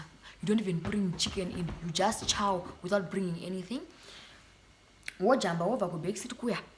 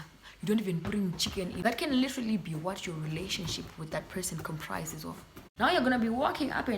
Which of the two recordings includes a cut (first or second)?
second